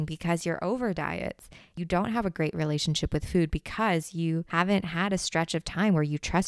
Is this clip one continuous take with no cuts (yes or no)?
no